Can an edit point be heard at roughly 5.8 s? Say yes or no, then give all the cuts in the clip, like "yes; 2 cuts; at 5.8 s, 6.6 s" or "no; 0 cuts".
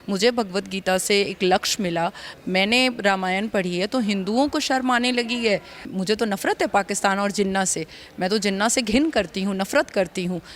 yes; 1 cut; at 5.8 s